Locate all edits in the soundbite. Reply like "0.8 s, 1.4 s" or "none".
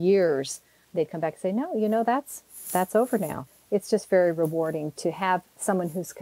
3.5 s